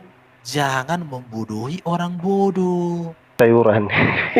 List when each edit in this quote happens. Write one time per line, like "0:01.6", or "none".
0:03.3

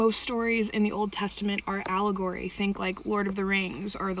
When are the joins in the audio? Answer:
0:01.2
0:02.7

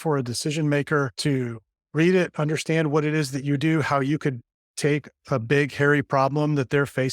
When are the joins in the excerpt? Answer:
0:01.1

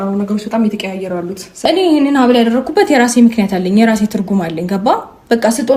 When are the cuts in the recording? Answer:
0:01.5

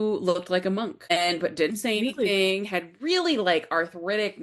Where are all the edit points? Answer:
0:01.1

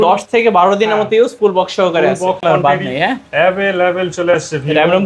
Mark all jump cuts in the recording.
0:02.4

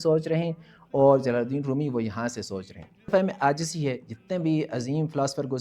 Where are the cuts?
0:03.1

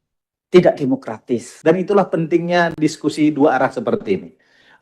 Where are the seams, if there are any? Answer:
0:01.5

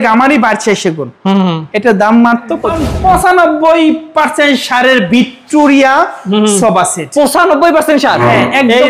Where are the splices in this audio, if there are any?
0:02.9

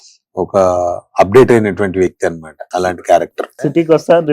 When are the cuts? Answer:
0:02.5
0:03.4

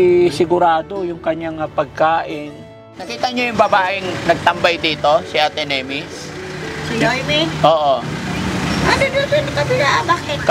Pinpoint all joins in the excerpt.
0:03.1

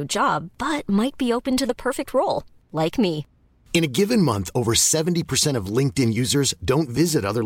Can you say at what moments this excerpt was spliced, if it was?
none

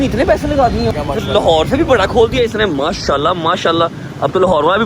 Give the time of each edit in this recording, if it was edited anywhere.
0:00.9

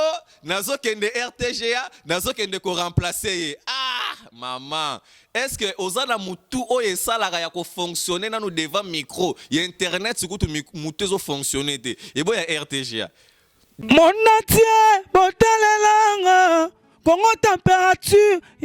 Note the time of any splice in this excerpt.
0:13.7

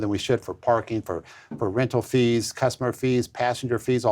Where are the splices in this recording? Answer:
none

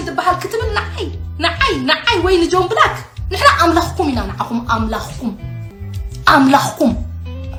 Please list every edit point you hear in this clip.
none

